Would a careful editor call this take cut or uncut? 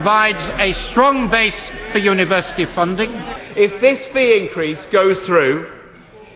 cut